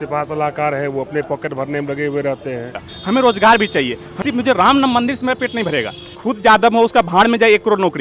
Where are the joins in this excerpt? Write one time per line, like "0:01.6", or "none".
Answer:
0:02.9
0:04.0
0:06.2